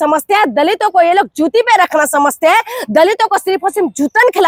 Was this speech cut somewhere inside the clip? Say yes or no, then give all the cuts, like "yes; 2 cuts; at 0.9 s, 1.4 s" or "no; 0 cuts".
no; 0 cuts